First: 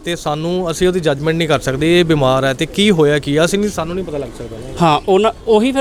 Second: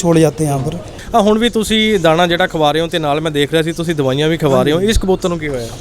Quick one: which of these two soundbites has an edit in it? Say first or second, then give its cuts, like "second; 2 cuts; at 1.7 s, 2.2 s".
second; 1 cut; at 0.9 s